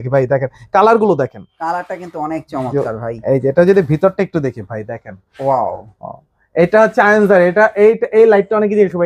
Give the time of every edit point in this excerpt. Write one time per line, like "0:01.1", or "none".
none